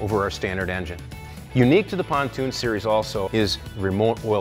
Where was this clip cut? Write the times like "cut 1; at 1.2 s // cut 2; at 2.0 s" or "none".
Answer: cut 1; at 2.1 s